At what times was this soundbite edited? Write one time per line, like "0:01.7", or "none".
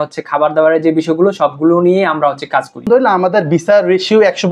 0:02.9